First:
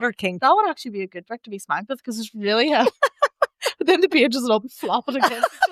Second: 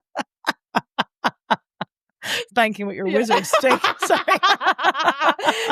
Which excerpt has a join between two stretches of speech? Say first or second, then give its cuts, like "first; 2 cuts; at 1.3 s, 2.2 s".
second; 1 cut; at 2.4 s